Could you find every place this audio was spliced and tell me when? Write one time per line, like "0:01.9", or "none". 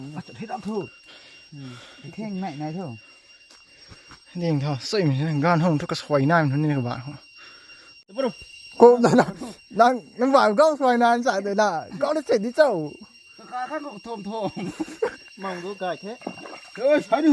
0:08.1